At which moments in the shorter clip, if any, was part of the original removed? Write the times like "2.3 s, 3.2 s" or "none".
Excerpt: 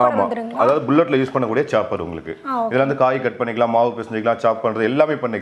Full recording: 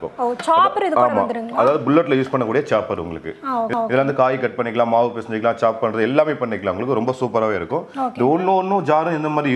2.7 s